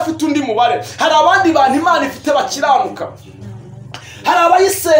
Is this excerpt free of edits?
yes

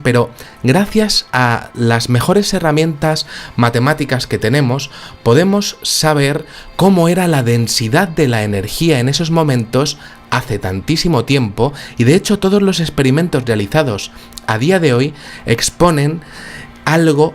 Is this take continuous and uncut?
no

